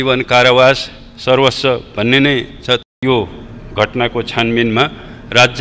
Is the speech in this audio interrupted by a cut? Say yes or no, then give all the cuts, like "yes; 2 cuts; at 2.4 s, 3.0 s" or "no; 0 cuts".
yes; 1 cut; at 2.8 s